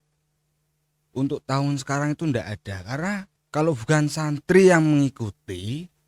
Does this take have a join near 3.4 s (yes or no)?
yes